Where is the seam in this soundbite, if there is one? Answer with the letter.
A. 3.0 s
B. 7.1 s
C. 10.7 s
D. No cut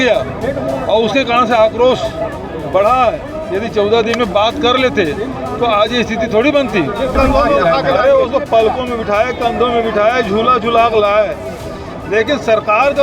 B